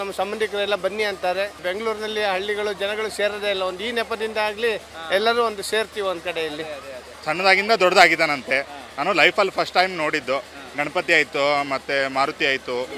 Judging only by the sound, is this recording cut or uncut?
cut